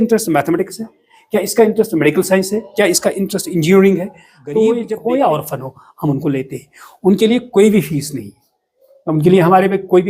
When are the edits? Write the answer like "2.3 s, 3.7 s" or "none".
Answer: 4.9 s